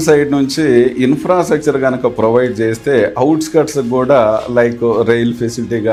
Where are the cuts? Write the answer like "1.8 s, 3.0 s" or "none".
none